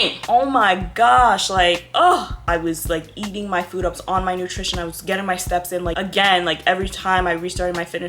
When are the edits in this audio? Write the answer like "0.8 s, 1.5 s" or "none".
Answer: 2.4 s, 6.0 s